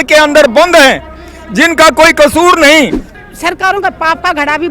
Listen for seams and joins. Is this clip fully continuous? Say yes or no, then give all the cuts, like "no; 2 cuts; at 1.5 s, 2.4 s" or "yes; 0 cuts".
no; 1 cut; at 3.1 s